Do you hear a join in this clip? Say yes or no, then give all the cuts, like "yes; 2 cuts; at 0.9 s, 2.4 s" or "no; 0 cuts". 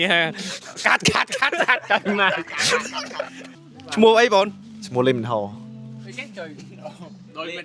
no; 0 cuts